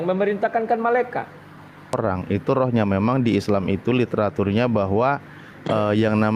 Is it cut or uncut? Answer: cut